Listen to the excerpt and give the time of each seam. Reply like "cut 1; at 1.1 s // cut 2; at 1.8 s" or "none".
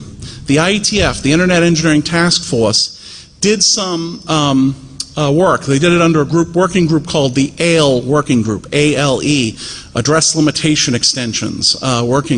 none